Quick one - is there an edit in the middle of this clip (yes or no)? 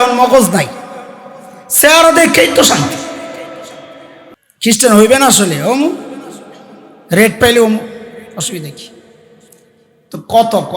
yes